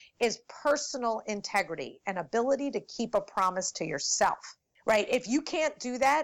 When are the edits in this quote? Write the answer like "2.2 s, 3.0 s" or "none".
none